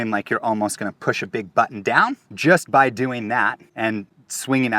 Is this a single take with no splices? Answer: no; 2 cuts; at 2.3 s, 4.0 s

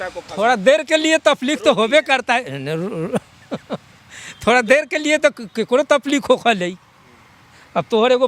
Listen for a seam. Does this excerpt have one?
no; 0 cuts

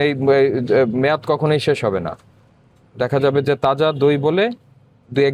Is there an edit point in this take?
no; 0 cuts

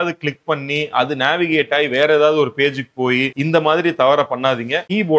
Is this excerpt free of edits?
yes; 0 cuts

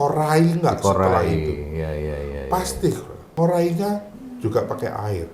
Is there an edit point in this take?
yes; 1 cut; at 3.2 s

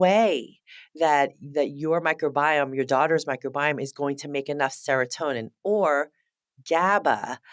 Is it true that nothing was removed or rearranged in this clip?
yes; 0 cuts

